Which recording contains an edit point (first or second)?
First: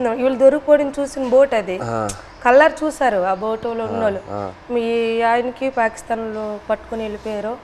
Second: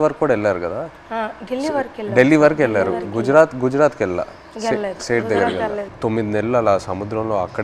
second